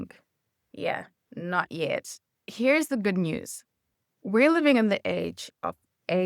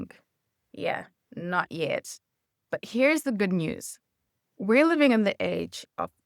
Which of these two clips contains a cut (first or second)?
first